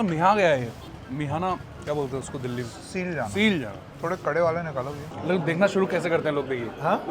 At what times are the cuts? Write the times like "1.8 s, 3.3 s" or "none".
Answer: 0.9 s, 1.7 s, 3.8 s, 5.1 s